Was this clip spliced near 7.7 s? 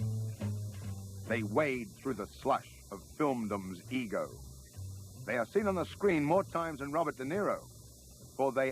no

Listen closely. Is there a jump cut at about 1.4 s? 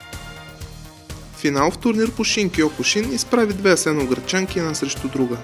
yes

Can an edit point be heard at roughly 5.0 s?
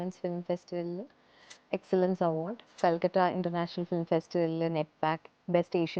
no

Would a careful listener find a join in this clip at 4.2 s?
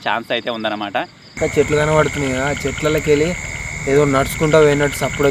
no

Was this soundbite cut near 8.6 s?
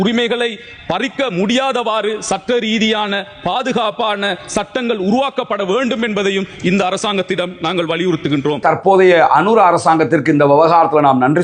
yes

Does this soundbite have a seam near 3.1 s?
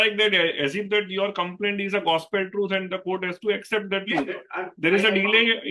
no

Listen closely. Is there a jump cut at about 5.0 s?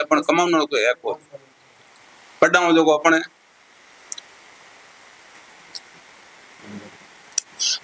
no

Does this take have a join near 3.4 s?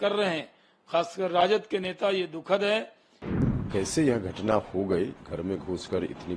yes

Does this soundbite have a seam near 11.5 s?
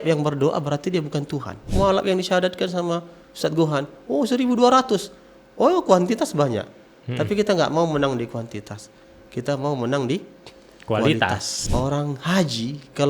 yes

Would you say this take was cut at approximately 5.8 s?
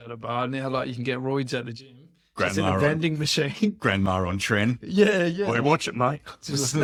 no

